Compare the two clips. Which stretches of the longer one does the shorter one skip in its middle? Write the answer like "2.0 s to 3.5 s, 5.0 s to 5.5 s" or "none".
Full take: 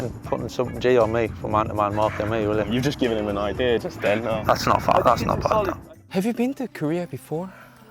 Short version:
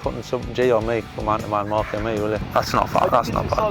2.7 s to 4.4 s

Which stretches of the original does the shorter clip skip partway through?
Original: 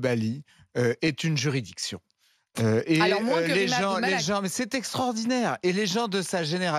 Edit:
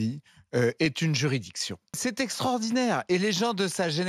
2.2 s to 4.5 s

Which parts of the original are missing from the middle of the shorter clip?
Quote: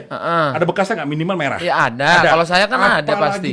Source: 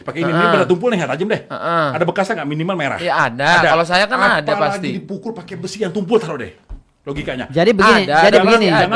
none

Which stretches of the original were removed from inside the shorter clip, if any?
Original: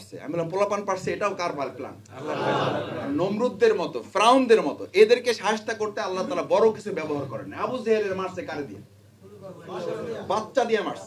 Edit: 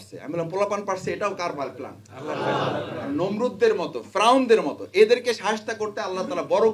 none

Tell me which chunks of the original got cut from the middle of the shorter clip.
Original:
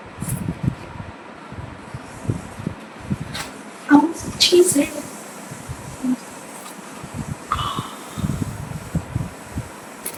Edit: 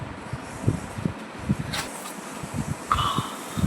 3.5 s to 6.5 s

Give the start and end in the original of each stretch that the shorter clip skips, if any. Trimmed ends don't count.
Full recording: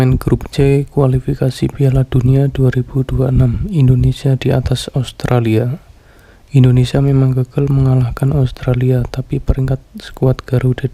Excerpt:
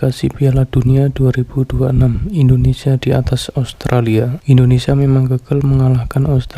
5.8 s to 6.4 s

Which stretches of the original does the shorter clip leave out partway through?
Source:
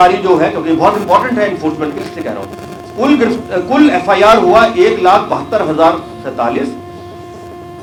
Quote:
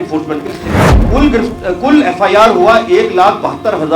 2.5 s to 2.9 s

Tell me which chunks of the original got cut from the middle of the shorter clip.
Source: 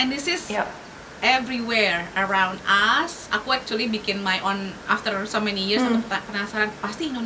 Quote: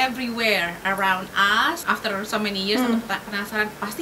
3.1 s to 4.8 s

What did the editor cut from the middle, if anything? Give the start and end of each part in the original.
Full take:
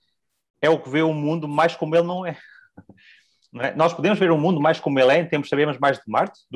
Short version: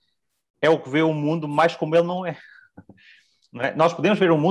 none

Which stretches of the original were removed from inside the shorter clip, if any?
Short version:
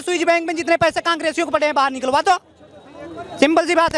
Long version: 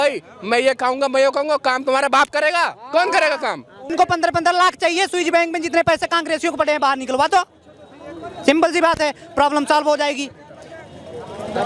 none

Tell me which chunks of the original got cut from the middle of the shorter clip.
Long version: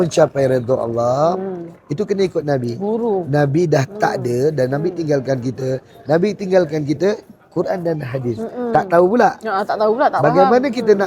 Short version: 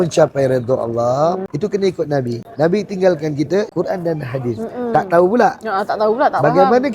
1.5 s to 1.8 s, 2.8 s to 5.9 s, 7.2 s to 7.5 s

